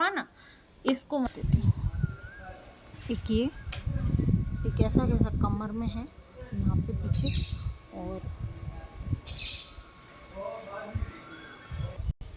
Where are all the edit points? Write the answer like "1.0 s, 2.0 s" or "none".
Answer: 1.3 s